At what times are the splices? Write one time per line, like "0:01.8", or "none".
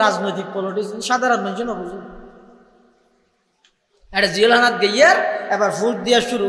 none